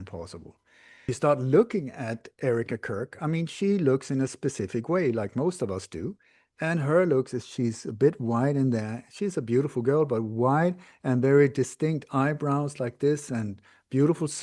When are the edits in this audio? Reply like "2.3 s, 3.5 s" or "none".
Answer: 1.1 s